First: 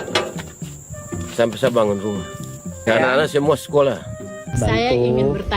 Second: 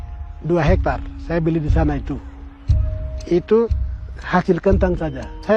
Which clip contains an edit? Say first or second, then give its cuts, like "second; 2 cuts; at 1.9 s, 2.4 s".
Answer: first; 2 cuts; at 2.8 s, 4.5 s